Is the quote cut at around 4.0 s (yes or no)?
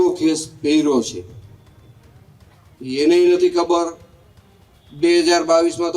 no